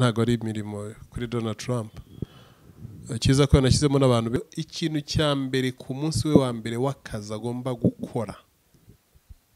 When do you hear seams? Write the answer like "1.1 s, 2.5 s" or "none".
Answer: 4.4 s